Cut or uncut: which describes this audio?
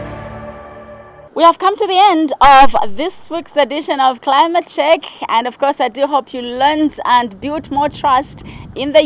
uncut